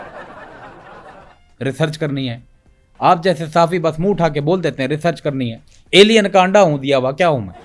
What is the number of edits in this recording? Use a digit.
1